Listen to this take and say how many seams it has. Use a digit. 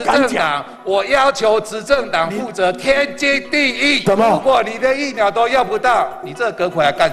1